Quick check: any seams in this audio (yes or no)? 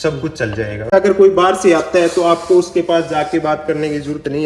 yes